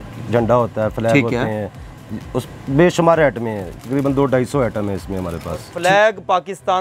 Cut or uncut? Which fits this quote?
cut